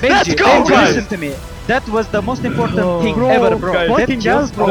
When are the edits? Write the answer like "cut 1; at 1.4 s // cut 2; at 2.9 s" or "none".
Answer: none